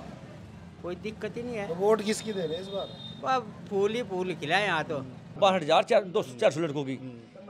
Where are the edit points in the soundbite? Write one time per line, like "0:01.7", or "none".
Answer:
0:05.4